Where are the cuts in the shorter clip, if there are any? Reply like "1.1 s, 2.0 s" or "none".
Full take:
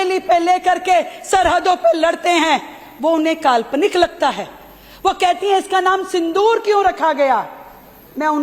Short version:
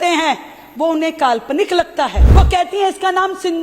2.2 s